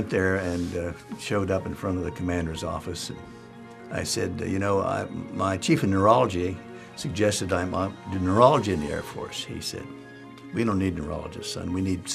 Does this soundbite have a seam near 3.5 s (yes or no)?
yes